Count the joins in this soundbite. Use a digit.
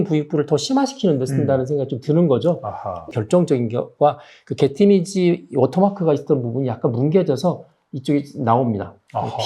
1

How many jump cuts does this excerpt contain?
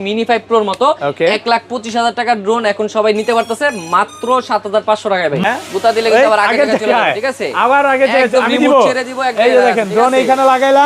1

